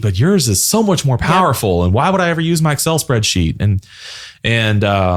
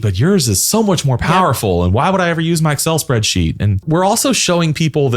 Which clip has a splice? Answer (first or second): second